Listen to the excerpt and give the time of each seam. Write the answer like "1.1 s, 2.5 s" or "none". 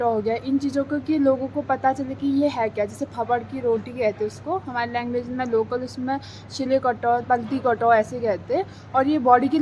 none